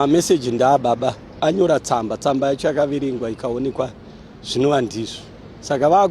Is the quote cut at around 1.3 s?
yes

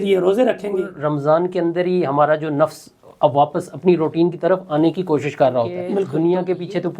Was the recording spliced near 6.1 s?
yes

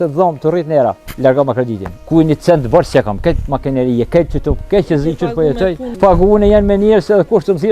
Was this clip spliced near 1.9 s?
yes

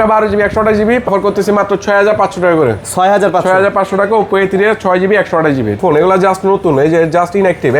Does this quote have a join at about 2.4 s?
no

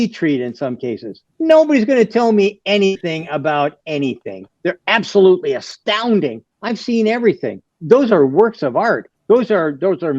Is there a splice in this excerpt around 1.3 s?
no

